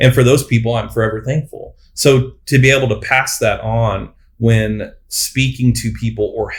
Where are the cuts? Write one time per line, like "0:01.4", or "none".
none